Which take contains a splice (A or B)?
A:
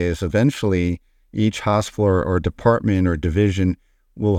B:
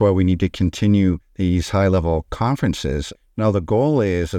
B